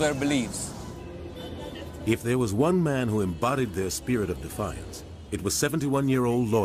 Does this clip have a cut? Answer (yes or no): yes